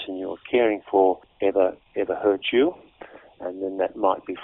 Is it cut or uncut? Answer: cut